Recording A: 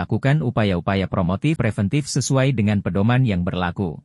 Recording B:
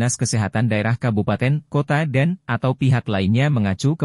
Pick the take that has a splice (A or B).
A